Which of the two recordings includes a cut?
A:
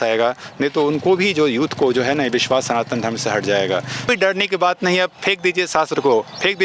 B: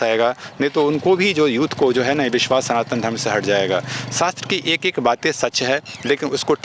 A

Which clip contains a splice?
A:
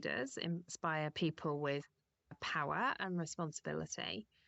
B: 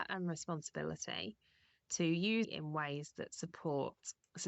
B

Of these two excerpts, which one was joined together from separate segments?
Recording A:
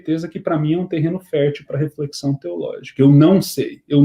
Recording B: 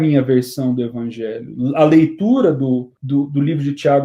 B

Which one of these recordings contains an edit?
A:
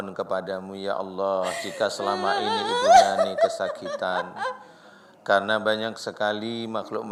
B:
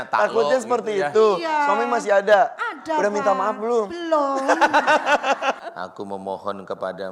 B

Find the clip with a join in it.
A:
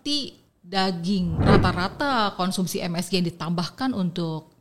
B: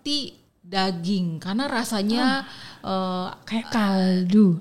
A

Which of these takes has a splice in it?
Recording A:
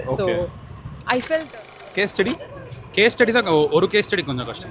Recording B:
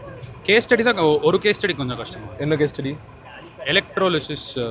A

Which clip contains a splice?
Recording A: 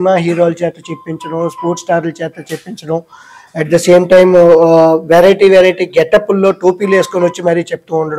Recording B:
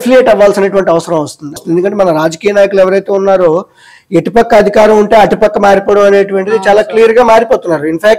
B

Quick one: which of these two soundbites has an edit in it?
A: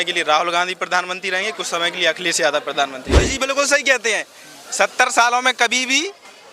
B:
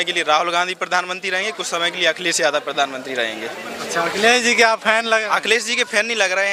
A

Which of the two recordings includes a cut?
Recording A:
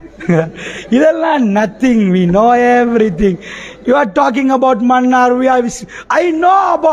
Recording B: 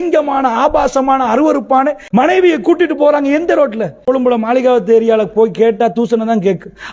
B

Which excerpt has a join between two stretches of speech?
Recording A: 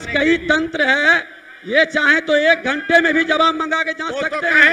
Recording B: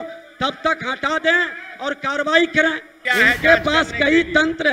B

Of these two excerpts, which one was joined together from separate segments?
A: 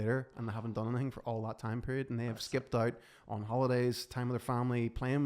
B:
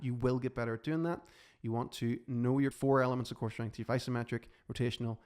B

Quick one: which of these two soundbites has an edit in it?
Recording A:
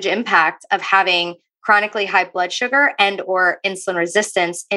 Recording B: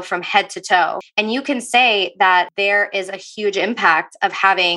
B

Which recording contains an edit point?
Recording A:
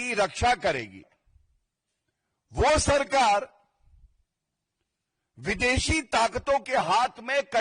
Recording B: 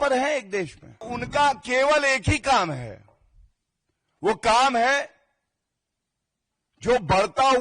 B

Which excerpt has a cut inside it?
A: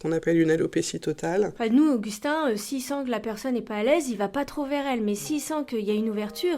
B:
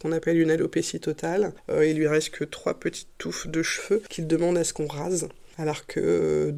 A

